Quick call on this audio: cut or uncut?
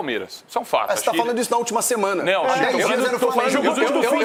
uncut